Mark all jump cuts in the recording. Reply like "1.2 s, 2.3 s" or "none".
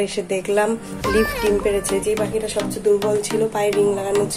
none